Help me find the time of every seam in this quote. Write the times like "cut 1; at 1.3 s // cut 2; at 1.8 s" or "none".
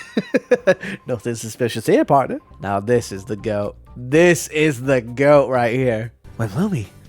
cut 1; at 2.4 s // cut 2; at 6.1 s